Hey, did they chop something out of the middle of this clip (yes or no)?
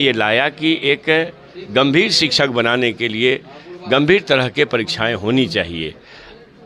no